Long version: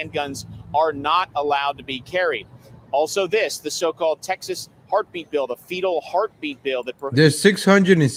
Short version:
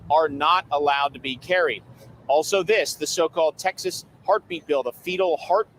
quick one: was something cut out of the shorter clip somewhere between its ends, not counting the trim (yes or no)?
no